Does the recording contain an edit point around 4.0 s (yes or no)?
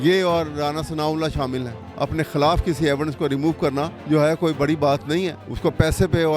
yes